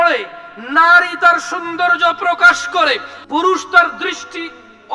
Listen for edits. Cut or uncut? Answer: cut